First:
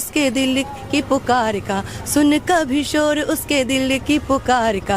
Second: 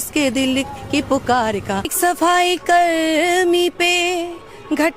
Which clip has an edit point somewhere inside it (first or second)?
second